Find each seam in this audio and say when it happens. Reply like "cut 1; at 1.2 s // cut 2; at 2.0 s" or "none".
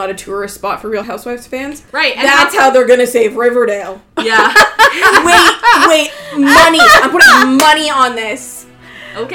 cut 1; at 1.1 s